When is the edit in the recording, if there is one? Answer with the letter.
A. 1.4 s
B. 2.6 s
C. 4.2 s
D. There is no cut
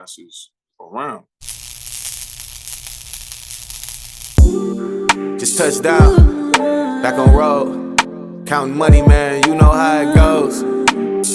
A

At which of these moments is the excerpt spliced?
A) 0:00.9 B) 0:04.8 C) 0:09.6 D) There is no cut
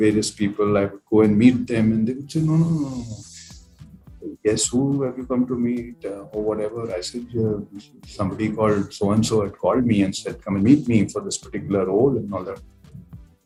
D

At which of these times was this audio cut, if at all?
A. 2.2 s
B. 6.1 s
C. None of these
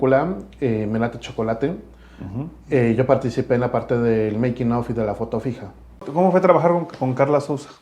B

